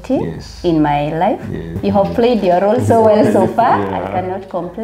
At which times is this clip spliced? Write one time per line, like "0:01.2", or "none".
0:01.7